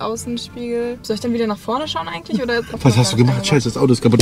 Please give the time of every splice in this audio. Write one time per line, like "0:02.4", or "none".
0:01.0
0:02.7